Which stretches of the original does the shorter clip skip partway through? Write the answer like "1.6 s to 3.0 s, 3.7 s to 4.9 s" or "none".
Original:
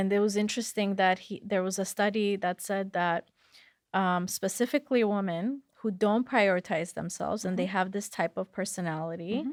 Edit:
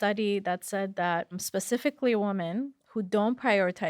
3.4 s to 4.3 s